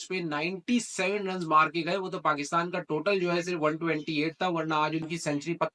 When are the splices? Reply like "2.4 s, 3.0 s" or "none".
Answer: none